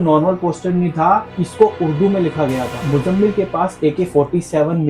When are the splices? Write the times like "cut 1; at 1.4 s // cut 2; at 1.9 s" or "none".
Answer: cut 1; at 2.7 s